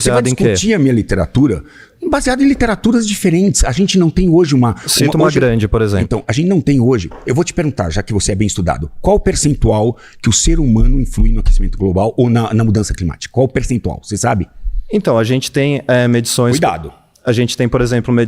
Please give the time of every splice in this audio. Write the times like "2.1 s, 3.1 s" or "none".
none